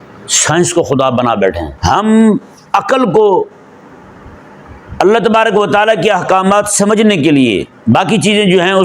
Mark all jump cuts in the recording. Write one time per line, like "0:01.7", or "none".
0:01.7